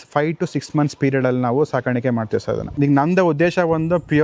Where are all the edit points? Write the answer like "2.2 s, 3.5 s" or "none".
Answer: 2.7 s